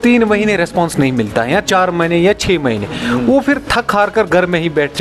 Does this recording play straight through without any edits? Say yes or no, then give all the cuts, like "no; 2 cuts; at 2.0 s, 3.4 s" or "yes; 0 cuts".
yes; 0 cuts